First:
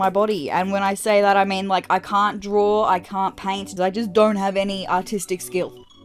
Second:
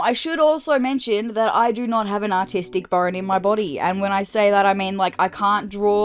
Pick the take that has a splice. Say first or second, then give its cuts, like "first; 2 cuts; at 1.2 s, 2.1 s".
first; 1 cut; at 3.7 s